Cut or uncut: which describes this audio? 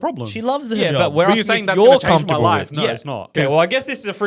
cut